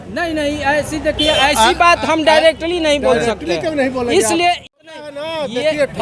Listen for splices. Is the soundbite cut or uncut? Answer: cut